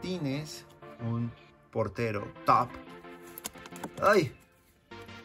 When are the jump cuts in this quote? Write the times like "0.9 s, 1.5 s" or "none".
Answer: 0.9 s

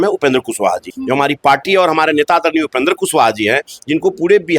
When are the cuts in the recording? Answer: 0.9 s

